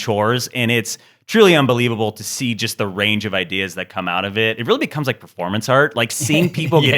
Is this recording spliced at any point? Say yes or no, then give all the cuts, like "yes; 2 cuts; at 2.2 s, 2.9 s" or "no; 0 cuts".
yes; 1 cut; at 4.6 s